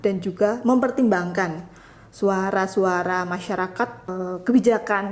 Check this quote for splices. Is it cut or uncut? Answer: cut